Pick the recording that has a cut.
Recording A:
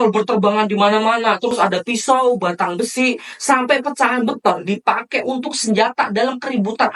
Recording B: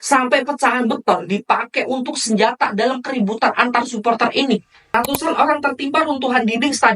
B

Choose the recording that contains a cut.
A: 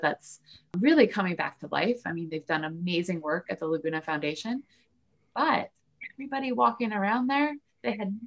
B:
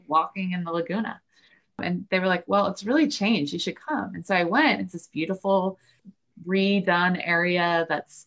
B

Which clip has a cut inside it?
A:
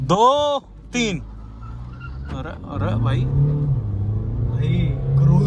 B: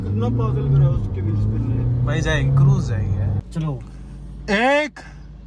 B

